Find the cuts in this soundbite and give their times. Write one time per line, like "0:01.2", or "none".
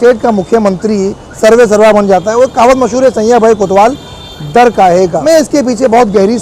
0:05.2